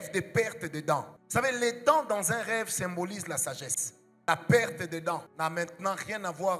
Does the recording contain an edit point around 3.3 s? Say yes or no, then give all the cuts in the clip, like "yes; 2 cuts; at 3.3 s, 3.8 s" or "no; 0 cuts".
no; 2 cuts; at 1.2 s, 5.3 s